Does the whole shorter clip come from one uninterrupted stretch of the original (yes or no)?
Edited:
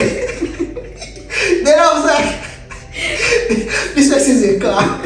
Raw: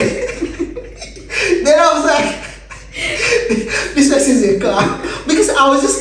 yes